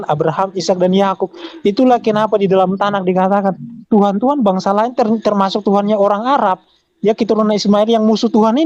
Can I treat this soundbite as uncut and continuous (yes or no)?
yes